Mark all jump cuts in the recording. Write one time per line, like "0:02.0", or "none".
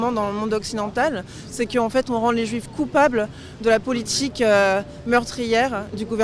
none